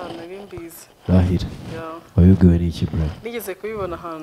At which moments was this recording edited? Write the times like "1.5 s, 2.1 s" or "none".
none